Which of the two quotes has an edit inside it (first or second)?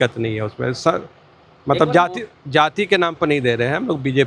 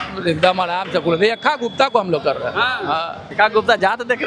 second